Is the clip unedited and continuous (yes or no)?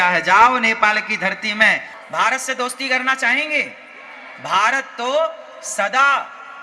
no